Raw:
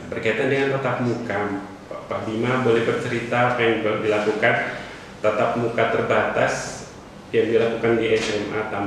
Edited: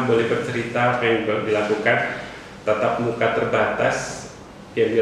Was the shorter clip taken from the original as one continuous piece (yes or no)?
yes